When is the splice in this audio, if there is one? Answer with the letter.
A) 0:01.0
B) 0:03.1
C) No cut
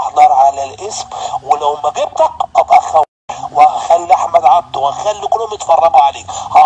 C